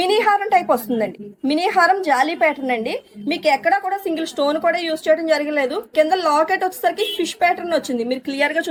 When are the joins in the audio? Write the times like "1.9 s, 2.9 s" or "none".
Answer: none